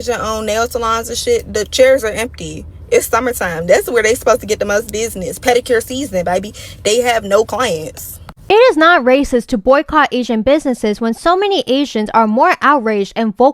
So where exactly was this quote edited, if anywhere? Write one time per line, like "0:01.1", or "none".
0:08.3

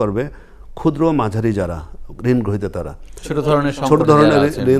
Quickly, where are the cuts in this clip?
none

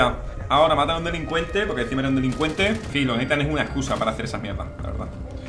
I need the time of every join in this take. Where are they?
0:02.9

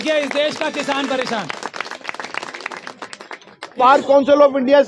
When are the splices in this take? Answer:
0:03.8

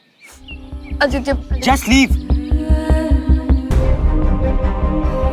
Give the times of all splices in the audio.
0:03.7

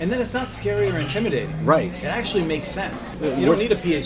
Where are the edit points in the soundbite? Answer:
0:03.2

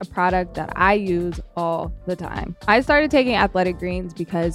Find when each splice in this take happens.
0:02.5

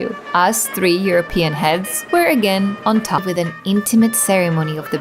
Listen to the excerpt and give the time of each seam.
0:03.2

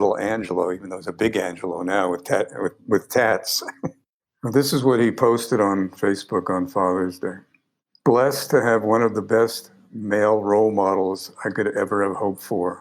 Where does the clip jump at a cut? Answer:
0:03.7

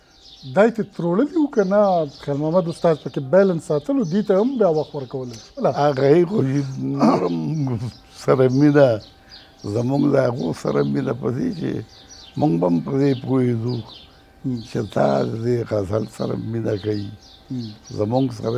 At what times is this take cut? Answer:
none

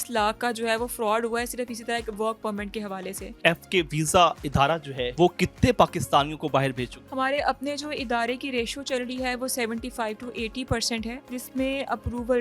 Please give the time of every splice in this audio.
0:03.3
0:05.0
0:07.0
0:11.2

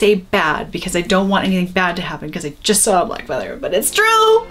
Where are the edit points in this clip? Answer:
none

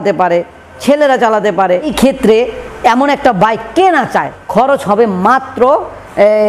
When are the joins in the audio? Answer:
0:01.9
0:04.3

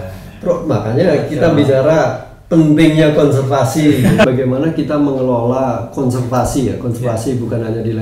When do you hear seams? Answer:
0:04.2

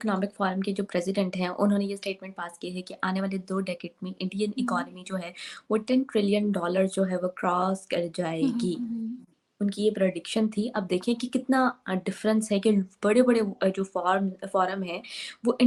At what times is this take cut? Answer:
none

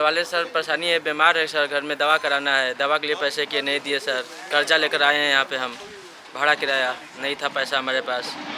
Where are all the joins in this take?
none

